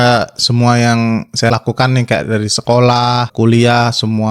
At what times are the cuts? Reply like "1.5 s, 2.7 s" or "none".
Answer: 1.5 s, 3.3 s